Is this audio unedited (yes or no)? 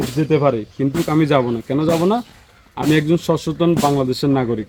yes